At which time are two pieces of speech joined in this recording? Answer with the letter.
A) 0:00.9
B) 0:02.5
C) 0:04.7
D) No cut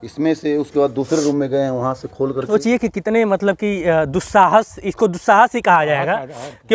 B